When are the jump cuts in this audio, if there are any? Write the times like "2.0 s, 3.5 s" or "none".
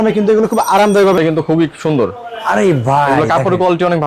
1.2 s